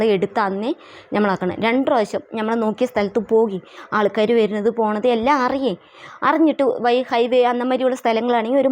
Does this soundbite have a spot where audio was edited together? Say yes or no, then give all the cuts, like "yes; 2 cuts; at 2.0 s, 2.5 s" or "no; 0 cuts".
no; 0 cuts